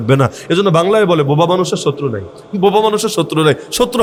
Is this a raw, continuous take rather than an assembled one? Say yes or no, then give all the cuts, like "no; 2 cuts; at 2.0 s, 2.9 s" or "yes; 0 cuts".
yes; 0 cuts